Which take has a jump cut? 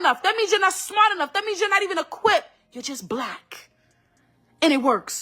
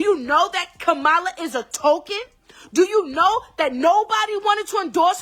first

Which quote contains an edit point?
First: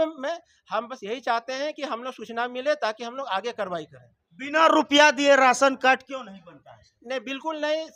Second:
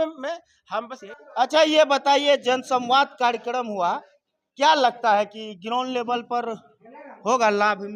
second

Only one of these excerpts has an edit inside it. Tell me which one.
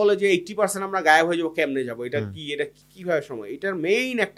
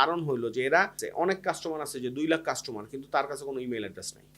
second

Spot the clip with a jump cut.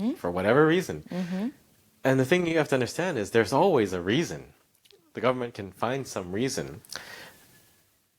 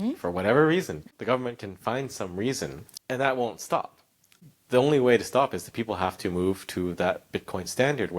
second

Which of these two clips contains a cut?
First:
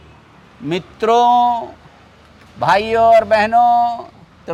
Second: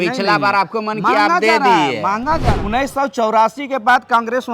second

